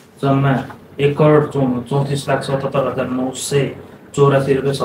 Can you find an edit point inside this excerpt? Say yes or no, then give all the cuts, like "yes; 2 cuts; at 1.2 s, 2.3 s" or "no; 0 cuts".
no; 0 cuts